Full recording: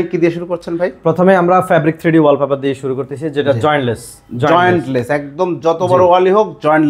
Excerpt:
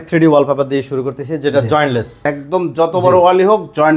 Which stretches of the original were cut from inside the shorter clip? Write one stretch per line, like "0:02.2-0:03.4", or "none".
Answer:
0:04.1-0:05.1

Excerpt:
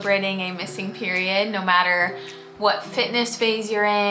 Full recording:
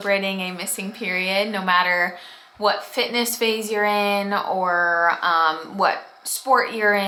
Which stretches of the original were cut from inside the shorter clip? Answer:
none

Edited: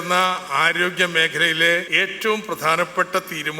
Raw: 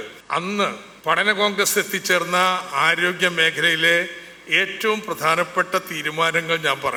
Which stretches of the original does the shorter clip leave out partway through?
0:04.1-0:04.5

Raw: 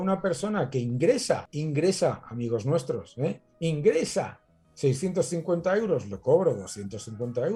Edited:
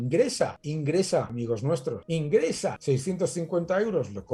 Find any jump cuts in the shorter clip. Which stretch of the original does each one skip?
0:02.5-0:03.1
0:04.3-0:04.7

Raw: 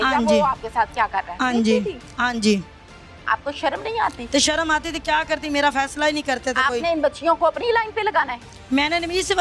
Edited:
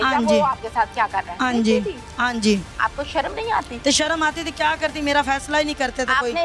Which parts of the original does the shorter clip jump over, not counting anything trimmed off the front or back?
0:02.7-0:03.2

